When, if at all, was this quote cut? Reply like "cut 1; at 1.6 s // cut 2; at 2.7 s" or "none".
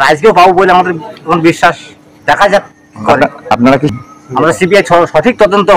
cut 1; at 3.9 s